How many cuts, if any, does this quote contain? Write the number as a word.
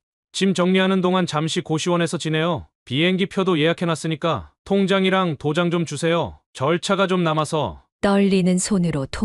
one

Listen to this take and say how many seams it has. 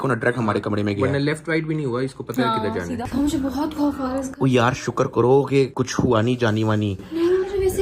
one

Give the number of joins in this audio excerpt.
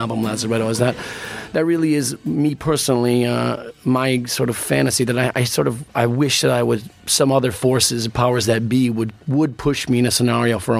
one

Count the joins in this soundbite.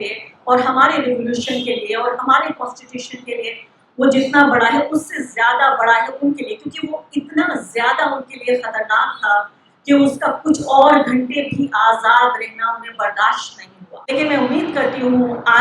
one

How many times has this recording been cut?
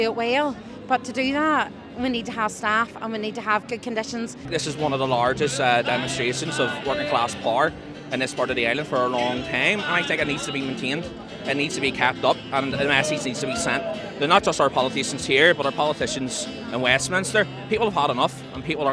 one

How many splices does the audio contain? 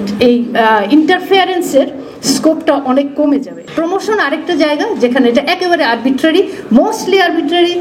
one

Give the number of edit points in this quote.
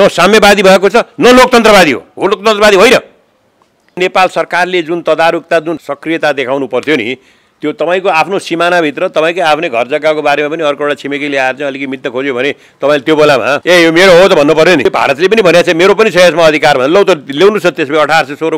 four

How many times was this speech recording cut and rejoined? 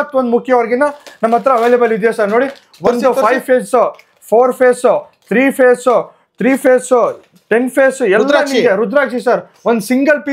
zero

